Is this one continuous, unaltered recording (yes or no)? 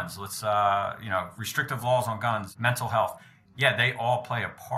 no